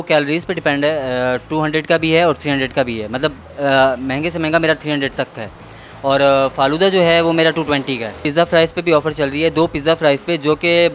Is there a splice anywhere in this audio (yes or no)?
yes